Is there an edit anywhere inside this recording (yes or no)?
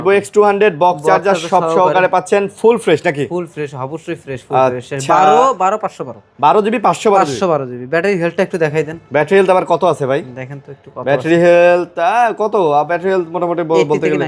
no